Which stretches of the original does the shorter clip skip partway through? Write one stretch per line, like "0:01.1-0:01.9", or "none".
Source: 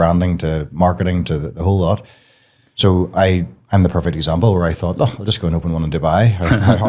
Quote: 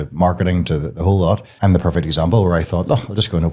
0:02.1-0:03.6